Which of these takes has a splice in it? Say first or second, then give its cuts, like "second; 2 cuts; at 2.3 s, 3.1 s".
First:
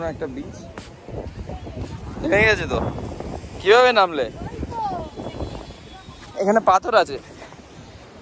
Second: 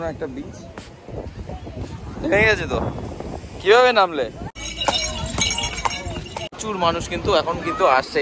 second; 2 cuts; at 4.5 s, 6.5 s